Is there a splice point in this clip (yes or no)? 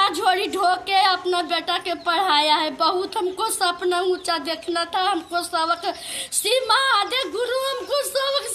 no